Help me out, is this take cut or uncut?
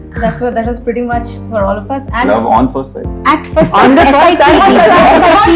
uncut